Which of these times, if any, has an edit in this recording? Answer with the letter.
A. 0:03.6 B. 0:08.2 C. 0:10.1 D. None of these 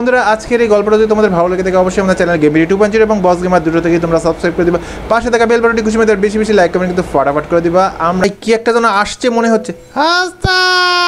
B